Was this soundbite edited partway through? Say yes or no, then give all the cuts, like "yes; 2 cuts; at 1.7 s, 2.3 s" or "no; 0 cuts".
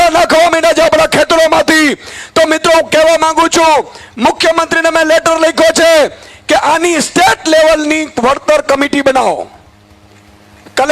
no; 0 cuts